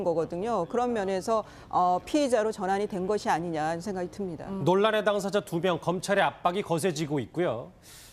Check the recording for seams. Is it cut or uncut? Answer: uncut